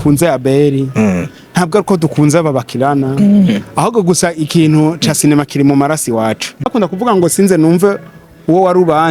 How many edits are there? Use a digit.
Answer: 1